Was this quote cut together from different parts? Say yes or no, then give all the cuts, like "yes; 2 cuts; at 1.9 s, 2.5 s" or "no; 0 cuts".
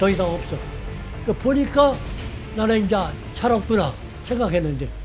no; 0 cuts